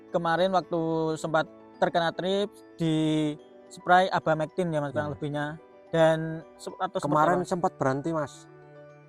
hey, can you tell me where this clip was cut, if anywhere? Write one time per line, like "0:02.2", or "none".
0:06.6

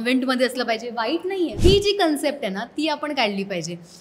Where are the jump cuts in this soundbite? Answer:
0:01.5

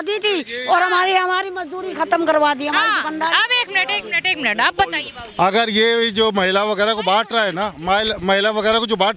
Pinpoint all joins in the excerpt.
none

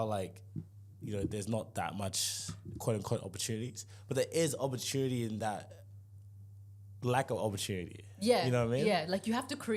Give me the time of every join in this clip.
none

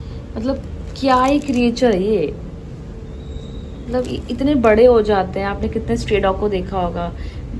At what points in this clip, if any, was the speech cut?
none

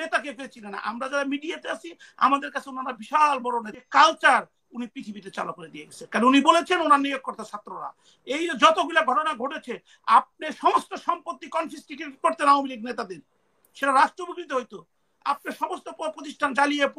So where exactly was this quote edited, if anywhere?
0:03.7

